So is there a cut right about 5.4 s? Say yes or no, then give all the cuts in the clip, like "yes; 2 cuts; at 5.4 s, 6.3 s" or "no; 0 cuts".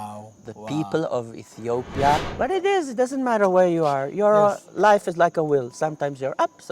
no; 1 cut; at 2.3 s